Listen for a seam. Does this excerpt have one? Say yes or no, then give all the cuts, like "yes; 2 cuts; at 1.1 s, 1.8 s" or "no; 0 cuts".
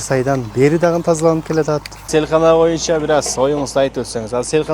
yes; 1 cut; at 1.9 s